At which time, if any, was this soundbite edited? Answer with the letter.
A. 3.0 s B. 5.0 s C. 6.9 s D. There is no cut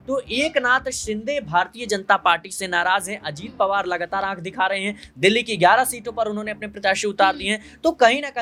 D